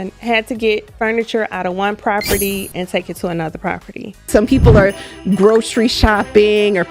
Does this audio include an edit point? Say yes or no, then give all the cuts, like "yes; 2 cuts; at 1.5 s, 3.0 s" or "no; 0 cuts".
yes; 1 cut; at 4.3 s